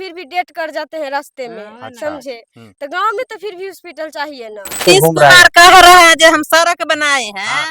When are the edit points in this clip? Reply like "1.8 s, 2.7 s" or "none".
4.8 s

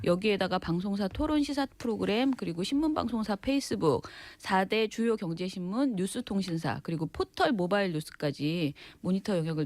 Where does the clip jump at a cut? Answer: 5.1 s

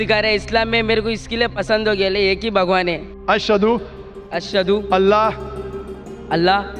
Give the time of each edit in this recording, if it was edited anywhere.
3.1 s

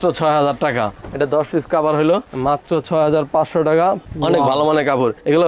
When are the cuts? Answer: 0.9 s, 4.0 s

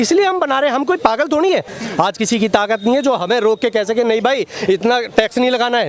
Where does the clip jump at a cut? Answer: 1.7 s

